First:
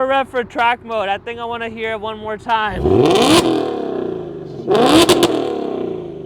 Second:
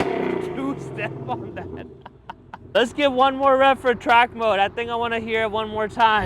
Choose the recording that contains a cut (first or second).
second